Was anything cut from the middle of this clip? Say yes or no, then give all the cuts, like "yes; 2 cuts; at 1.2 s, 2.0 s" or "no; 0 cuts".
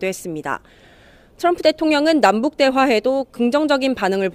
yes; 1 cut; at 2.0 s